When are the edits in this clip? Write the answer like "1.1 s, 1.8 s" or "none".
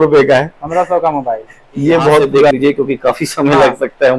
2.5 s